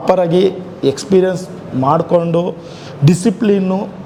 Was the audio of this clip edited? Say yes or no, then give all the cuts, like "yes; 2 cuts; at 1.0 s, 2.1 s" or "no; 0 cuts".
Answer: no; 0 cuts